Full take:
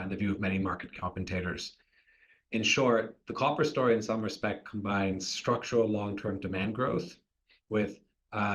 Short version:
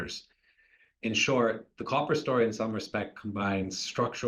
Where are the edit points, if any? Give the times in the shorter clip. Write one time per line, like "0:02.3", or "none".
none